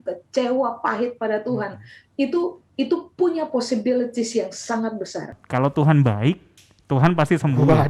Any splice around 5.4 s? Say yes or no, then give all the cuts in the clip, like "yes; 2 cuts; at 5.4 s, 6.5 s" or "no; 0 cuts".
yes; 1 cut; at 5.4 s